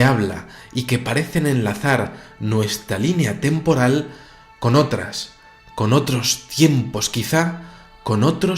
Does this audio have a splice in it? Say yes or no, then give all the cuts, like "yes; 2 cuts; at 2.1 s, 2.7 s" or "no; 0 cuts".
yes; 1 cut; at 6.0 s